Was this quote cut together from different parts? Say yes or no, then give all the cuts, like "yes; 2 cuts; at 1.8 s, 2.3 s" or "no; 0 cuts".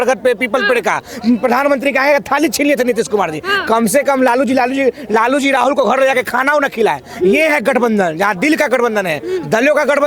no; 0 cuts